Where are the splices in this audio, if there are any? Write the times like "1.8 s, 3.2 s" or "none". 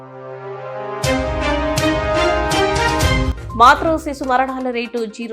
3.3 s